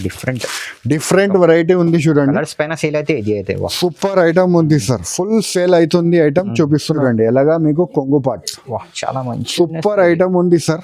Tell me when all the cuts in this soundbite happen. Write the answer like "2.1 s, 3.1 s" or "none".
7.0 s